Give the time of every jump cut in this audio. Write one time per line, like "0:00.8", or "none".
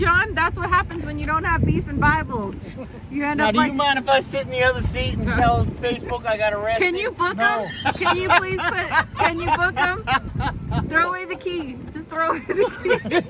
none